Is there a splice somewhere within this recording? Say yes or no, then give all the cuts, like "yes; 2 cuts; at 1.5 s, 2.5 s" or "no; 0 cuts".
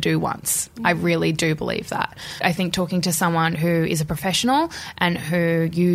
yes; 1 cut; at 2.4 s